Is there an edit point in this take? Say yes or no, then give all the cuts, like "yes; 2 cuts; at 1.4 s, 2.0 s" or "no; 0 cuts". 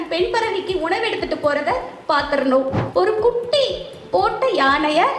yes; 1 cut; at 2.8 s